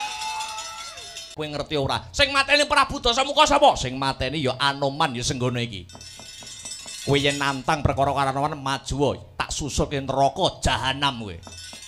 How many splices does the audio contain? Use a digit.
1